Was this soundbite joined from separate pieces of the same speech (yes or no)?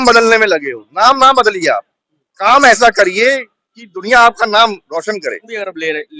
yes